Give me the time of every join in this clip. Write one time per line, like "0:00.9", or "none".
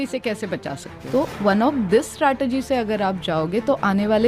0:00.9